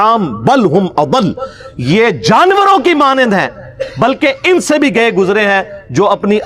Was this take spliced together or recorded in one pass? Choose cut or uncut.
uncut